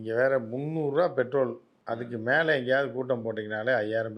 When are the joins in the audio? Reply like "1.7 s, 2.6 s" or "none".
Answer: 2.1 s